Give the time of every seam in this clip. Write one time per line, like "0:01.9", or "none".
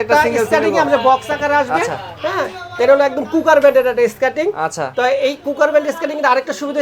none